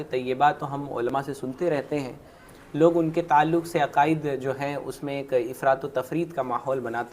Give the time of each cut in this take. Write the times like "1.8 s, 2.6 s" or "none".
2.4 s

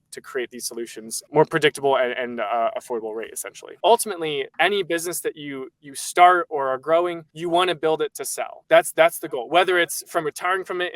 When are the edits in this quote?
3.8 s

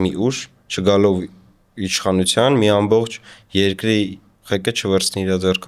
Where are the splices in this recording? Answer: none

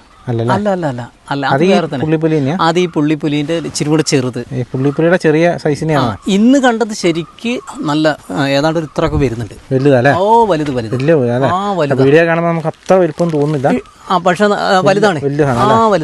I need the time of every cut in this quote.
4.5 s, 7.7 s

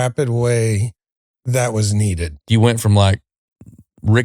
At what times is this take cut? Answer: 1.3 s, 2.5 s

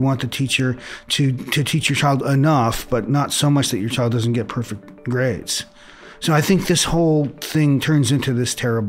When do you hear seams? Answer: 7.8 s

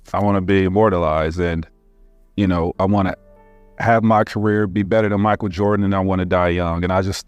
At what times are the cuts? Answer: none

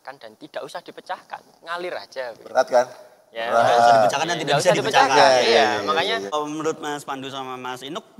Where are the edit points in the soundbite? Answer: 6.4 s

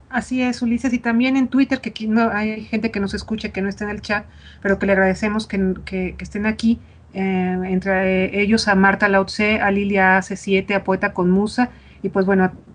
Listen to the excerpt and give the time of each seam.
none

